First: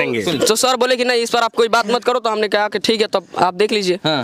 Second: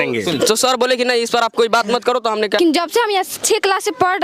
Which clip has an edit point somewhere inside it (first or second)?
second